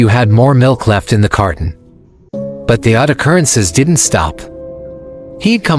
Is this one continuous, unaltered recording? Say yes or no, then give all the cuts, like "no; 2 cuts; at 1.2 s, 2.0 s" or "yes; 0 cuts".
no; 1 cut; at 1.0 s